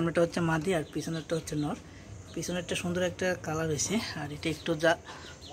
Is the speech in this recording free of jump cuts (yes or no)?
yes